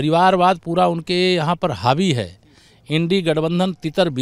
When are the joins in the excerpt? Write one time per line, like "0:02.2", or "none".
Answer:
none